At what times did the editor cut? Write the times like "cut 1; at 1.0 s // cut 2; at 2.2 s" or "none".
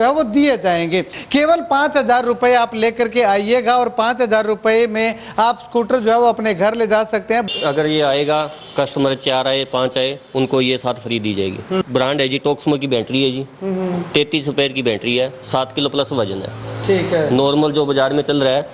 cut 1; at 1.1 s // cut 2; at 7.4 s // cut 3; at 11.8 s